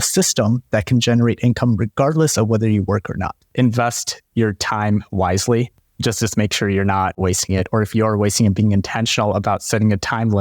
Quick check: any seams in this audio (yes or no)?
yes